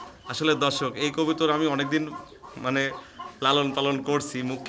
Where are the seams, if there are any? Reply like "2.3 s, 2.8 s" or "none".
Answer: none